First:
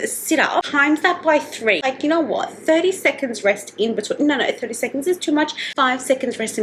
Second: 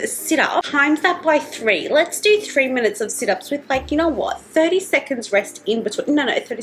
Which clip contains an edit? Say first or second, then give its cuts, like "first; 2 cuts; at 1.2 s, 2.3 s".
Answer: first; 1 cut; at 1.8 s